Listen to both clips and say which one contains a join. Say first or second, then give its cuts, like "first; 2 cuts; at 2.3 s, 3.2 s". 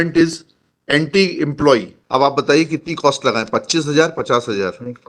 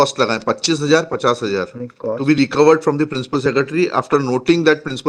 first; 1 cut; at 2.0 s